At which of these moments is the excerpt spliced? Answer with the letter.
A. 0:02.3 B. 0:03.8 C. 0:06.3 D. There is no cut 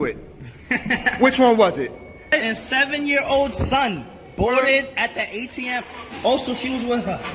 A